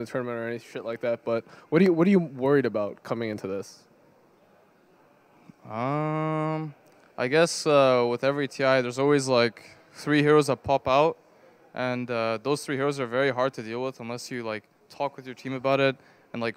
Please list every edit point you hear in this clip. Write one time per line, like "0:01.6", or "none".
none